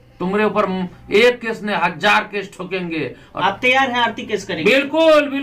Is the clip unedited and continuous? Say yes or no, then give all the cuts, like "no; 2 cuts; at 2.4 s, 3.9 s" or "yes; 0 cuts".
no; 1 cut; at 3.3 s